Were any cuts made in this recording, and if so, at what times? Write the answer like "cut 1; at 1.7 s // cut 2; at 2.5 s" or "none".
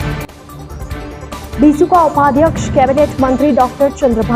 cut 1; at 1.5 s